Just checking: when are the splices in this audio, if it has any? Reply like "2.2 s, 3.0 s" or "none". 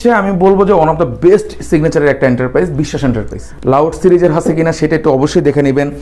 3.5 s